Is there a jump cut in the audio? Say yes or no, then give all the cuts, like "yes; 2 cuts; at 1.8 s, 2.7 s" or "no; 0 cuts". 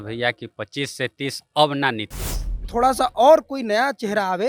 yes; 1 cut; at 2.7 s